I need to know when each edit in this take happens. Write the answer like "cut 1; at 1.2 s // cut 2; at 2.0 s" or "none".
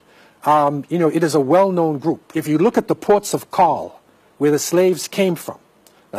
cut 1; at 2.3 s